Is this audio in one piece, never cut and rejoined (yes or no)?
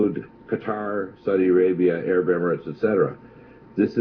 yes